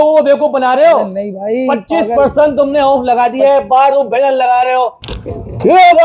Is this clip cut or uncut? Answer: cut